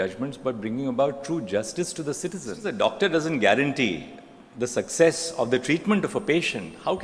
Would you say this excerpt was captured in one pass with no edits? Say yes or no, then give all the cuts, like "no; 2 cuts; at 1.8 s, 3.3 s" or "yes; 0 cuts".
no; 1 cut; at 2.6 s